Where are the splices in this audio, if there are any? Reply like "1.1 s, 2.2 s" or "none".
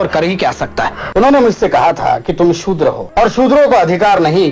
1.0 s, 3.0 s